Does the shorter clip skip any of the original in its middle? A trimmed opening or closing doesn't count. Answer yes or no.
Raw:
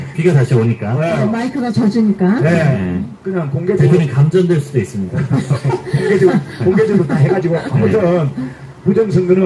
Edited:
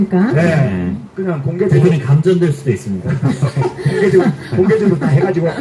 no